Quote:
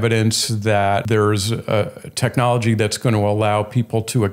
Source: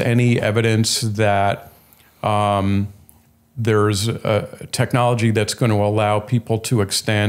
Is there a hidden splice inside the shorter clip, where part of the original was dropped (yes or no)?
yes